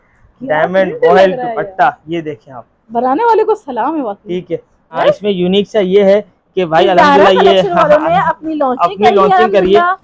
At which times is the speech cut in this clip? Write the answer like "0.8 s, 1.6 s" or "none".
5.0 s

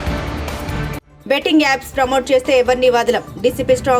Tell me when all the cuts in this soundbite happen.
none

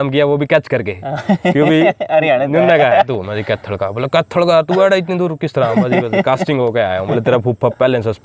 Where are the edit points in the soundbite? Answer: 3.1 s, 7.1 s

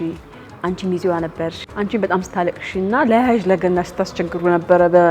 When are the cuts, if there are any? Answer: 1.6 s

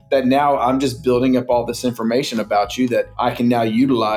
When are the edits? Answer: 3.1 s

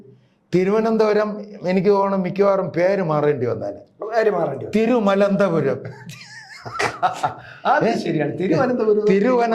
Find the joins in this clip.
none

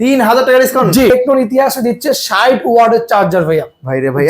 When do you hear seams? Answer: 1.1 s

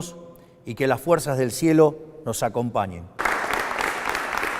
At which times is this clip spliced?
3.2 s

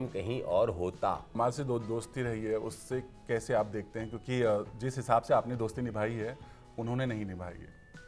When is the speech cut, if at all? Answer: 1.3 s

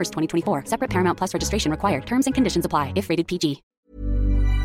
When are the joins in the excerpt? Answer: 3.7 s

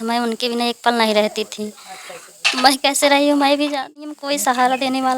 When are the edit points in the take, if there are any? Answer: 4.2 s

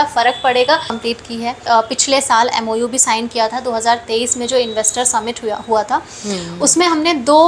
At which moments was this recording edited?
1.1 s

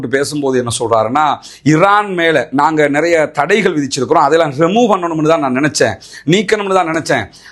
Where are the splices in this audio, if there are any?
none

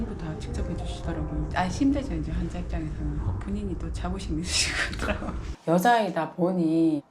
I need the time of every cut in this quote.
5.4 s

